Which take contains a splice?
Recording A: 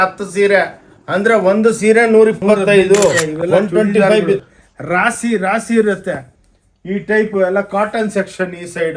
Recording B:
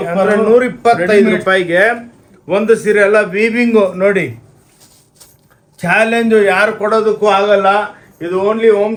A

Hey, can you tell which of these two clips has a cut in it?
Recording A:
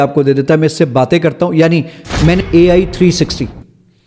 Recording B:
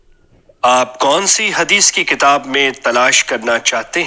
A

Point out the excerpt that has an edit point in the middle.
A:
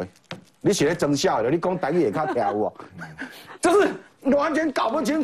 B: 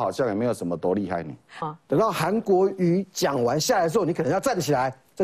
B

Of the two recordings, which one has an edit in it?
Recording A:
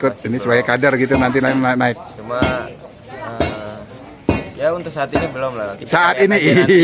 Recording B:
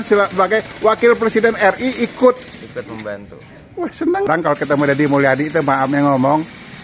B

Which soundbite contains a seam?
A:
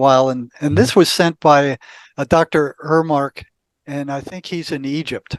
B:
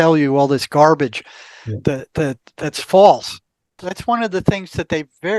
B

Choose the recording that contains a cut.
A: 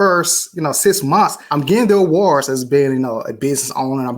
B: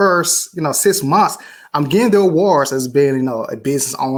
A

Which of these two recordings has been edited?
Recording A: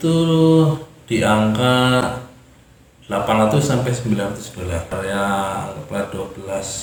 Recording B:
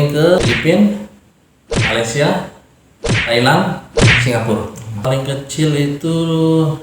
B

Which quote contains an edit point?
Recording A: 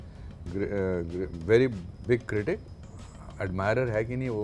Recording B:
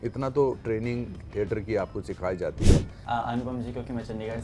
B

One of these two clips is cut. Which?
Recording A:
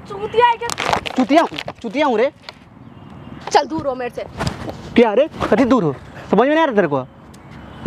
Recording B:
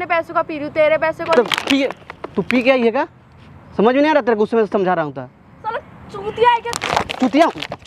A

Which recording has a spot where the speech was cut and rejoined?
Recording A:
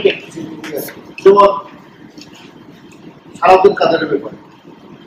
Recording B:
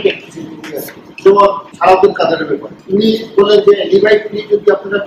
B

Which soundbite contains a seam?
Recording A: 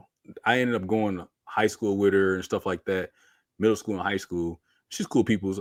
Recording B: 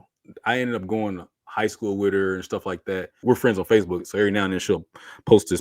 B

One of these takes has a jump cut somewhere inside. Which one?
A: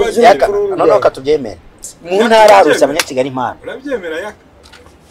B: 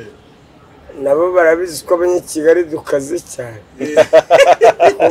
A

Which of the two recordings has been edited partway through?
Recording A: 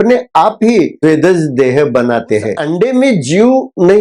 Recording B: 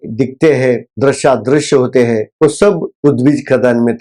A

